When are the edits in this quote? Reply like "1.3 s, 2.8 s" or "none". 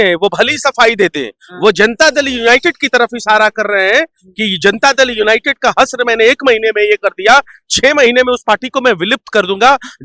none